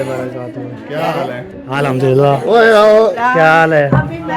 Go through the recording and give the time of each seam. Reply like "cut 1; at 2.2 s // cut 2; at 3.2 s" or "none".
cut 1; at 3.2 s